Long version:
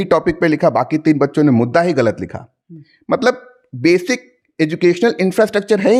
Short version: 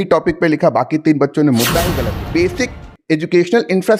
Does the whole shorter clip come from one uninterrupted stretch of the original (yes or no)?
no